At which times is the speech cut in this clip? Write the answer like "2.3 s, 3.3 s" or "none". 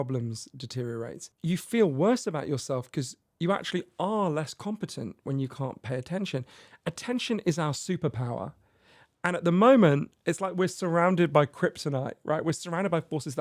1.2 s